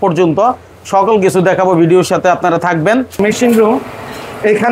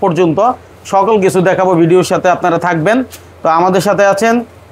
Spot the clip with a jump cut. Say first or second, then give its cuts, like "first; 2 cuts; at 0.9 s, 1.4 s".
first; 1 cut; at 3.1 s